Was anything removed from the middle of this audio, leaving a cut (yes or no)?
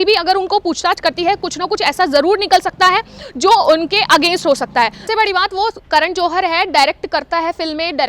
yes